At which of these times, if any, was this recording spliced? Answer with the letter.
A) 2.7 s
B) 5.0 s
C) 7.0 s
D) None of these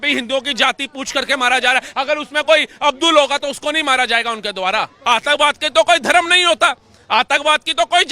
B